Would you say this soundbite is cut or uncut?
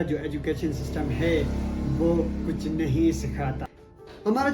cut